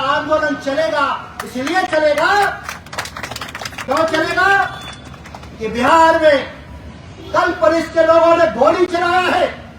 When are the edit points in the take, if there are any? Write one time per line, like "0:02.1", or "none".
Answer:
none